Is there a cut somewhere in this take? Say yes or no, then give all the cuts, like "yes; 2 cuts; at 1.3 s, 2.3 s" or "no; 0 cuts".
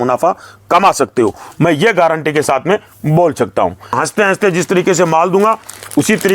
yes; 1 cut; at 3.9 s